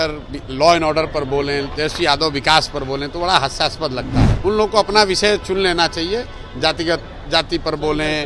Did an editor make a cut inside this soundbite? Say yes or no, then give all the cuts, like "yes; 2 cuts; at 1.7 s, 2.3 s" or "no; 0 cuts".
yes; 1 cut; at 4.2 s